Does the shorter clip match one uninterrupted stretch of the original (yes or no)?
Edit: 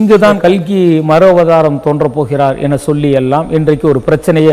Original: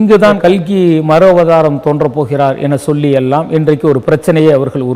yes